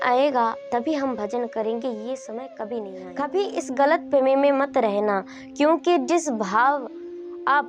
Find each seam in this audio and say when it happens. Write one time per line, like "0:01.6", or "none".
0:03.0